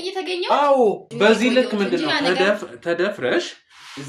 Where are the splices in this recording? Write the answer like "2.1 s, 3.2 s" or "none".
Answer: 1.1 s